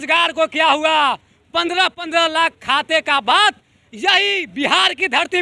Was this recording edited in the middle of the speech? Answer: no; 0 cuts

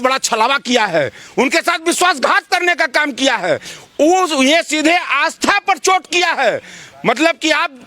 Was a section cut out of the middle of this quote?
no; 0 cuts

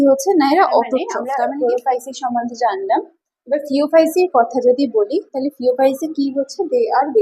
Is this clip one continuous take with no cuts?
no; 1 cut; at 1.2 s

